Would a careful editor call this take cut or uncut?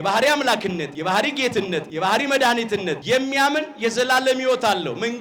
cut